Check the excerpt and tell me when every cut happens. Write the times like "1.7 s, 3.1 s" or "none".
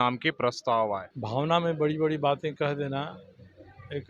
1.1 s